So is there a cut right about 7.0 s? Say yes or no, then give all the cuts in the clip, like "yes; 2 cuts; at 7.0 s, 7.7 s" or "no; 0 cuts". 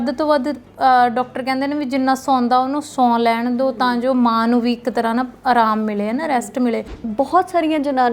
yes; 1 cut; at 7.0 s